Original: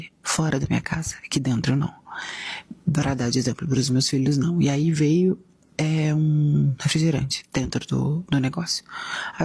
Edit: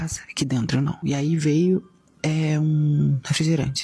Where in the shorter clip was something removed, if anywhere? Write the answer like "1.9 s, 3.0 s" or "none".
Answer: 1.0 s